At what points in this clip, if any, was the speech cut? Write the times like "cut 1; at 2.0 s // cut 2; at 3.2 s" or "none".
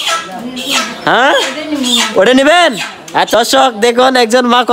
cut 1; at 3.3 s